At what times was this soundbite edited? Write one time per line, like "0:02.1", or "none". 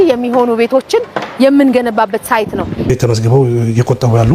0:02.9